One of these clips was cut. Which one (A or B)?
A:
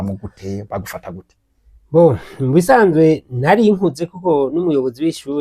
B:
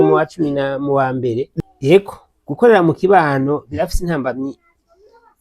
B